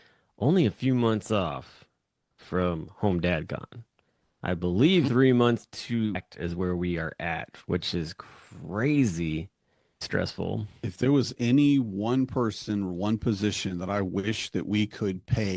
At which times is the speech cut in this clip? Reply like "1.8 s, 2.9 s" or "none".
10.0 s